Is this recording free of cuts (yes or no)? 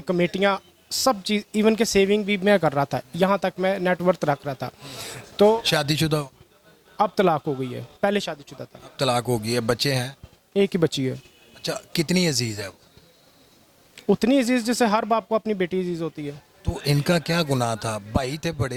yes